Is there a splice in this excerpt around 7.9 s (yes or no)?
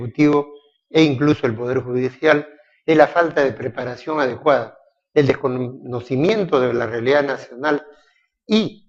no